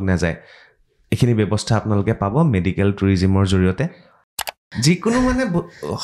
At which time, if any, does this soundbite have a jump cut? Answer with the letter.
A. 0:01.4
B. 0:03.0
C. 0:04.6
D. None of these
C